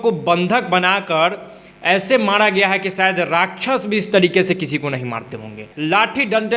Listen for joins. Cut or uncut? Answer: uncut